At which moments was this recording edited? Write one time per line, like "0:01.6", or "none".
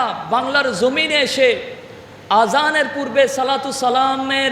none